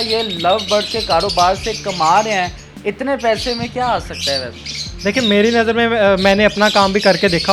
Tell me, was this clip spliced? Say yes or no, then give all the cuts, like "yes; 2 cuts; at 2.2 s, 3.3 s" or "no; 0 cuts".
no; 0 cuts